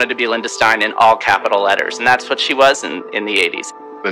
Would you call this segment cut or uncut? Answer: uncut